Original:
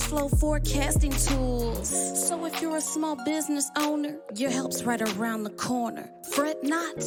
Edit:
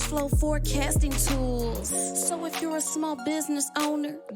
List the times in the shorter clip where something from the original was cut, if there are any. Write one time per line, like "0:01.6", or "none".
none